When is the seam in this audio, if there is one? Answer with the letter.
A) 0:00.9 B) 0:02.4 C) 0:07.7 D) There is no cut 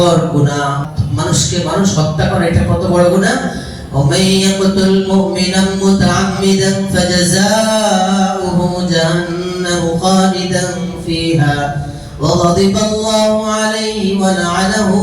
A